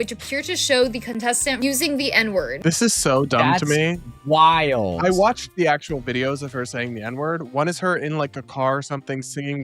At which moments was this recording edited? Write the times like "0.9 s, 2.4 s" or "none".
1.6 s, 2.5 s

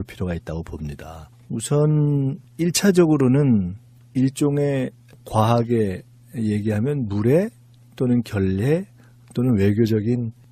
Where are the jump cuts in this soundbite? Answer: none

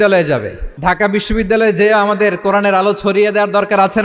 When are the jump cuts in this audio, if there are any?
1.1 s

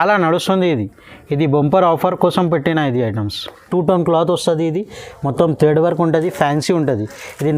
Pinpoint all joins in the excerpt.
3.6 s

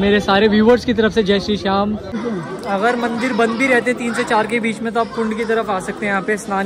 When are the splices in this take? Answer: 2.2 s

